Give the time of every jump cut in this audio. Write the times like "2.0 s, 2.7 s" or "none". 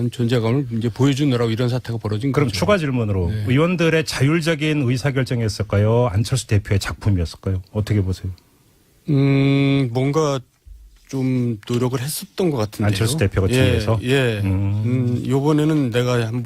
4.3 s